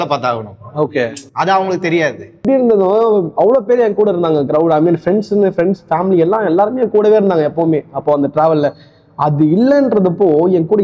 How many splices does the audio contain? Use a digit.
1